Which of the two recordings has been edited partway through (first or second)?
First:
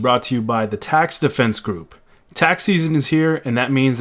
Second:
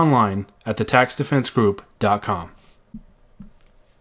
second